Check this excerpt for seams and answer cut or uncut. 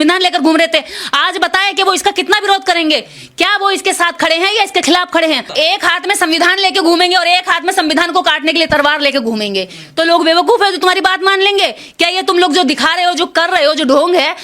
cut